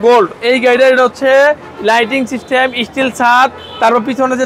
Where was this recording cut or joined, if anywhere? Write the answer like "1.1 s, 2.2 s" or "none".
none